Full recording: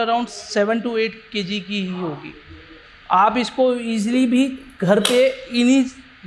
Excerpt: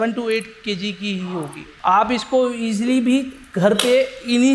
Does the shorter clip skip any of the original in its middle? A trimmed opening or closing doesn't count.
yes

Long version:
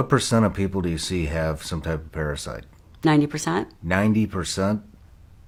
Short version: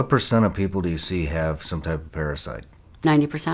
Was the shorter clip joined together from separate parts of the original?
no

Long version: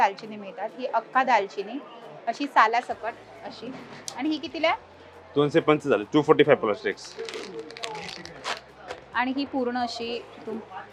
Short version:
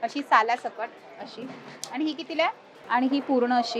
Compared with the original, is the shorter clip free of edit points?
no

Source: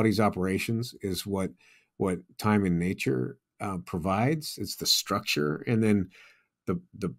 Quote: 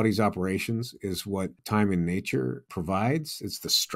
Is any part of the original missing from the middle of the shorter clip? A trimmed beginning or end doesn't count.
yes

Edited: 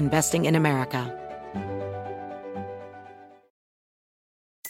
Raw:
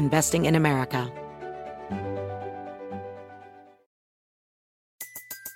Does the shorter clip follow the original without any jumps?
no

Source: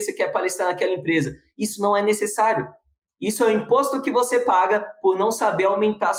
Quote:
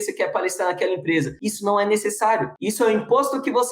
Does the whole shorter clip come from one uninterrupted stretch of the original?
no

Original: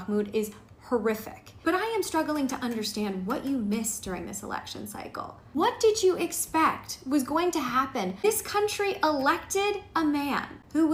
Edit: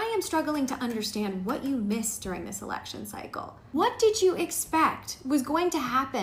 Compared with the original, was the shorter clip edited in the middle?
no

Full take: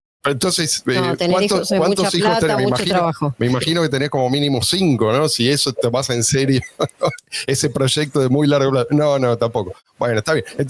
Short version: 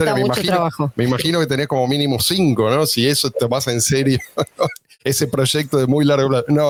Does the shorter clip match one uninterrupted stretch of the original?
yes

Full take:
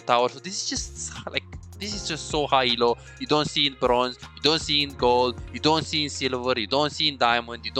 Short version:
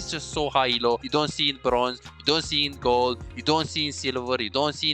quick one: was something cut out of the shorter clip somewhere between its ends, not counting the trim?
yes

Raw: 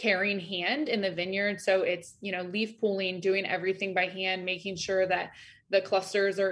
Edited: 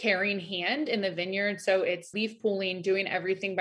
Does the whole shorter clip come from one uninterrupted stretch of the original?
no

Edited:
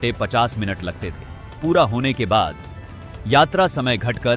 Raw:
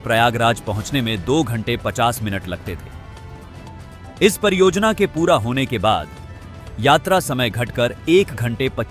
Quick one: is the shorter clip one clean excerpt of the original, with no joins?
no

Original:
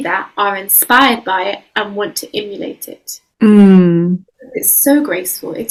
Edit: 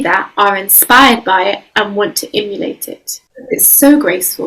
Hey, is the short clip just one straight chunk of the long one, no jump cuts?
no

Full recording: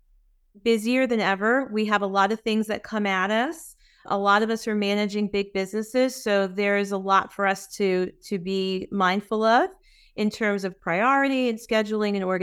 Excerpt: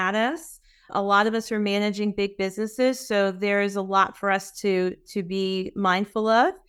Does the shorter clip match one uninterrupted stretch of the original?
yes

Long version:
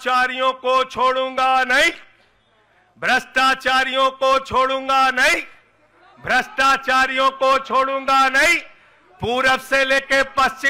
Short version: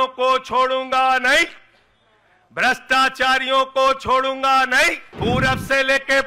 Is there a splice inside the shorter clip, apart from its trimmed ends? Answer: yes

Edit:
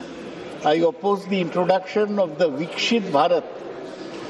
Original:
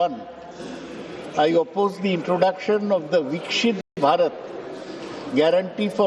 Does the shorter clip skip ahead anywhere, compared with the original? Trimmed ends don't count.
yes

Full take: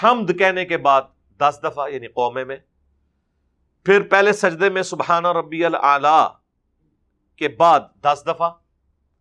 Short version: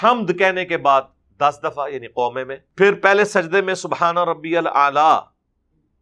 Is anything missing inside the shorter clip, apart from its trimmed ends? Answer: yes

